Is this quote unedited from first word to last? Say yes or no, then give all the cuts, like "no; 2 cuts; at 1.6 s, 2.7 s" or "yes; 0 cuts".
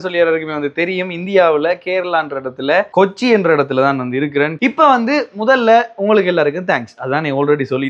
no; 1 cut; at 4.5 s